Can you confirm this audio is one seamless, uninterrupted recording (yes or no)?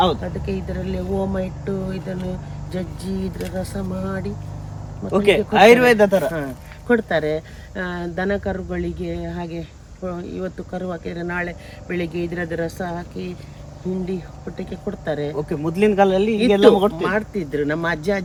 yes